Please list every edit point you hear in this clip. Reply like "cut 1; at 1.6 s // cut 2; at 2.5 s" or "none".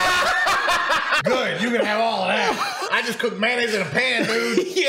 cut 1; at 1.2 s // cut 2; at 2.9 s